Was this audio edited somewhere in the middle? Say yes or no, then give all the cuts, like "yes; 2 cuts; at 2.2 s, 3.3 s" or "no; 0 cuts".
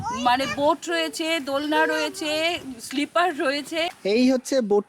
yes; 1 cut; at 3.9 s